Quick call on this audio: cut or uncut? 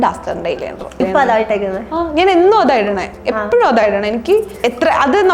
cut